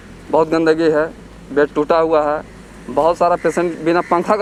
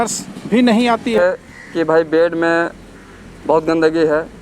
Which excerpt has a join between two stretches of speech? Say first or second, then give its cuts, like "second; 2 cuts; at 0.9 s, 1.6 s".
second; 1 cut; at 1.2 s